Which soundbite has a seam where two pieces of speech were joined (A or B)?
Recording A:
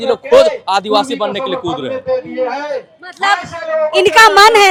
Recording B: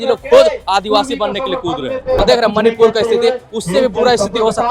B